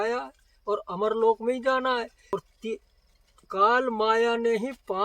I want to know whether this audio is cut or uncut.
cut